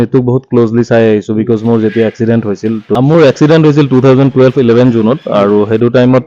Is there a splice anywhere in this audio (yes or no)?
yes